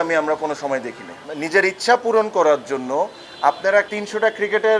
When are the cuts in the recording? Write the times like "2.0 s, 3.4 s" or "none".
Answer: 1.3 s, 3.9 s